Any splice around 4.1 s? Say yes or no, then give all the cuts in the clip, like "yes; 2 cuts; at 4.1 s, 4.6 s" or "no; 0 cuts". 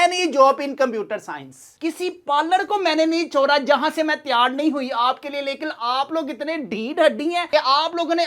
no; 1 cut; at 1.7 s